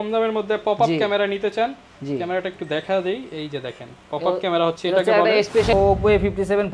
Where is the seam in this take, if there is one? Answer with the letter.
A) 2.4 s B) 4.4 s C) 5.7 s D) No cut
C